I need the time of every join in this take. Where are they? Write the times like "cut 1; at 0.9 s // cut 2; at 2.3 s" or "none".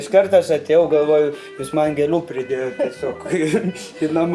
none